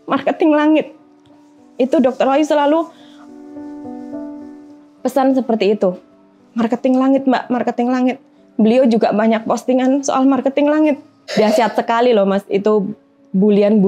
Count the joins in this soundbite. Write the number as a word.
one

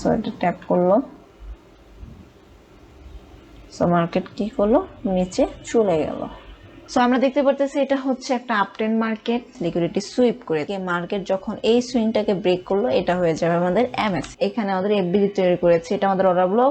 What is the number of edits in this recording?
four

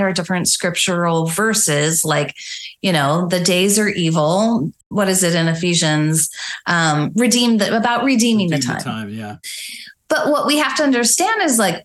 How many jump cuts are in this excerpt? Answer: one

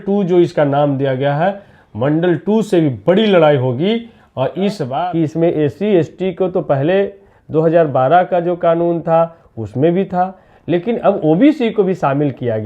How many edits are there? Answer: one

